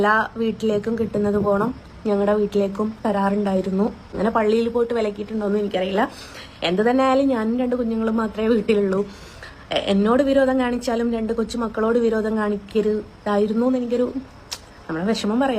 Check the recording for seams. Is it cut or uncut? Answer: cut